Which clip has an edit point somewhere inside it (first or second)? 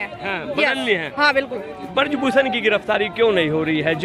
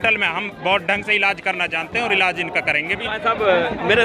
second